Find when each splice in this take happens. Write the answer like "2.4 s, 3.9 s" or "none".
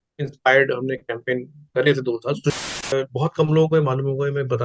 2.6 s